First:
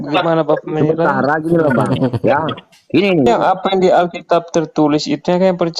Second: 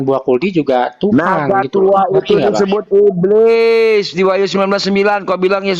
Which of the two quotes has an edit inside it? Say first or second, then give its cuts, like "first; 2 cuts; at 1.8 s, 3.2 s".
first; 1 cut; at 3.3 s